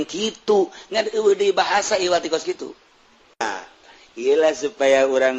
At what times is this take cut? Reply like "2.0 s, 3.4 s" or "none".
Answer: 3.4 s